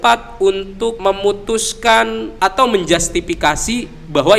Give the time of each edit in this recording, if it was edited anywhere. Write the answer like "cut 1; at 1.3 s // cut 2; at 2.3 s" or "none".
cut 1; at 1.0 s // cut 2; at 2.3 s